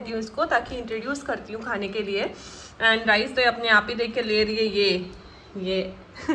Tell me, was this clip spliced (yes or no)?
no